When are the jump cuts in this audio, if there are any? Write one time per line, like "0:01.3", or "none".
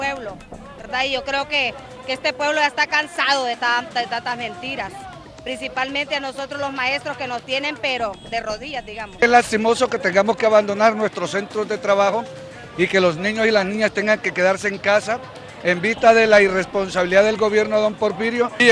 none